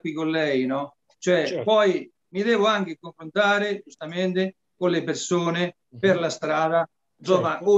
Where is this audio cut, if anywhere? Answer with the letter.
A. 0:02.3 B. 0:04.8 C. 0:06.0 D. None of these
A